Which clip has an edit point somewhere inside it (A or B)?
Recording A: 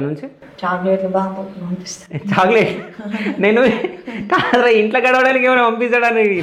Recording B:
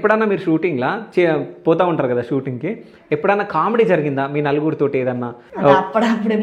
B